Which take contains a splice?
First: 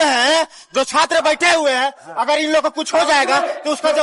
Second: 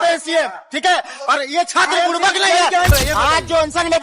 second; 1 cut; at 2.9 s

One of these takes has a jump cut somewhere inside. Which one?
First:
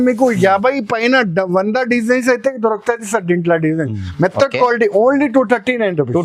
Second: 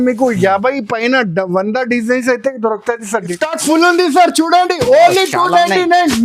second; 1 cut; at 3.3 s

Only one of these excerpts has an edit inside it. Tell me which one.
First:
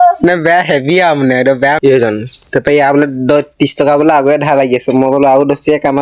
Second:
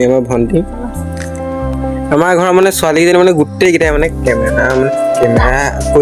first; 1 cut; at 1.8 s

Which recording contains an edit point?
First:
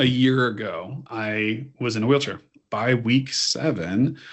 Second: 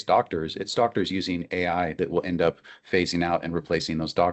first; 2 cuts; at 1.0 s, 2.6 s

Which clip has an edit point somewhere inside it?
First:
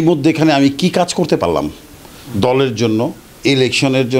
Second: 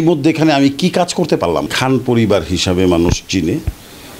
second; 1 cut; at 1.7 s

